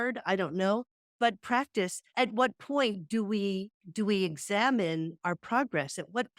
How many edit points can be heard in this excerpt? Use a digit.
2